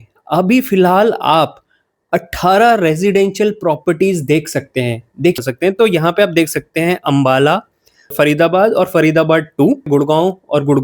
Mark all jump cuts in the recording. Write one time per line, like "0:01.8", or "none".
0:05.4
0:08.1
0:09.9